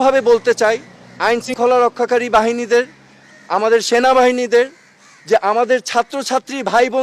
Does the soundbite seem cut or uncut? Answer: cut